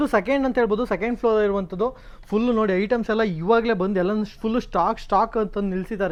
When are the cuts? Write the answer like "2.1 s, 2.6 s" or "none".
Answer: none